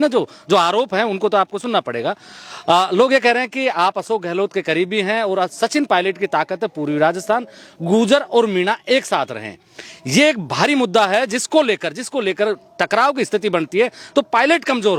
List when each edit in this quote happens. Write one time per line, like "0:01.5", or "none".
none